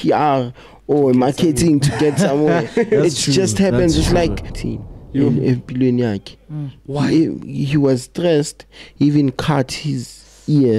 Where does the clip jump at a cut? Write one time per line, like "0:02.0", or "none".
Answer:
0:04.6